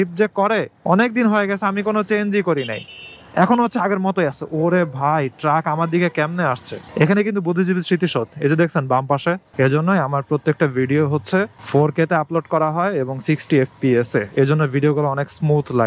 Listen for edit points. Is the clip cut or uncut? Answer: cut